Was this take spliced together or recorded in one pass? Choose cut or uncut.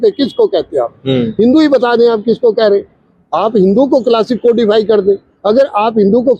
uncut